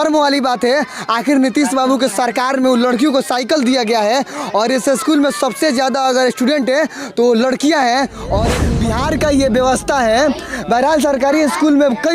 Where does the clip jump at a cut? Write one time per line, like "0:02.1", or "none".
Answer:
0:08.6